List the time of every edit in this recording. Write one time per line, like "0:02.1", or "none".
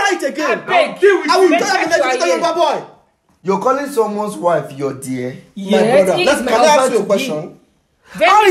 0:03.4